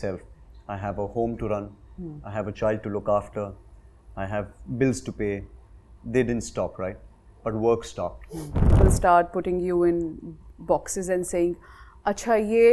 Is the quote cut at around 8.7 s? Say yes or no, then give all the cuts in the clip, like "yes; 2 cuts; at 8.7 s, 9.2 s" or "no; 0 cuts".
yes; 1 cut; at 8.7 s